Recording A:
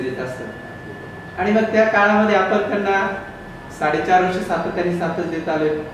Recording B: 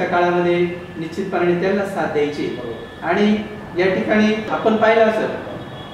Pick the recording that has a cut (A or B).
B